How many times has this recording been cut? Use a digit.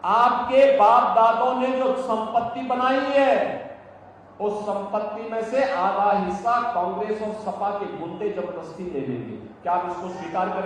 0